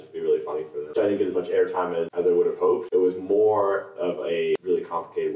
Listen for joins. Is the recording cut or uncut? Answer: cut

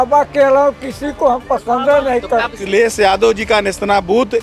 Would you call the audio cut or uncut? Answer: cut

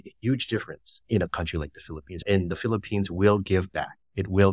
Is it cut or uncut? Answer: uncut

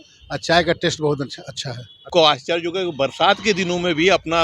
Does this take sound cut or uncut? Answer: cut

